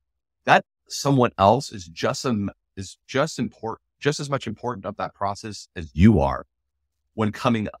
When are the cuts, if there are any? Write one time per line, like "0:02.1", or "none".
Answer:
none